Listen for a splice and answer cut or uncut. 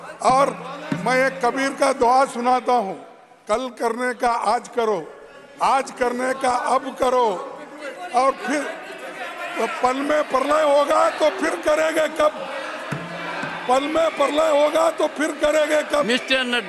uncut